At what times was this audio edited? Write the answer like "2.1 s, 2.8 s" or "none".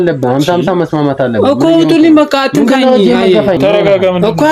3.5 s